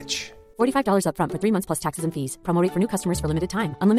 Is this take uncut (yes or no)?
yes